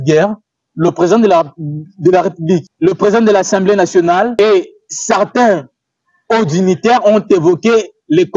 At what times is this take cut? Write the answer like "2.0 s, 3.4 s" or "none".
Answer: 2.7 s, 4.3 s